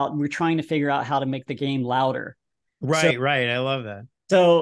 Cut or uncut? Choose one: uncut